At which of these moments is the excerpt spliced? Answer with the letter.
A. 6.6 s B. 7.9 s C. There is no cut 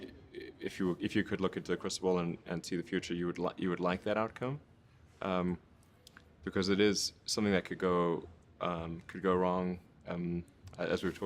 A